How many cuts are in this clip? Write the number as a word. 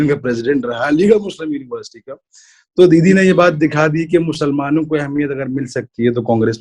zero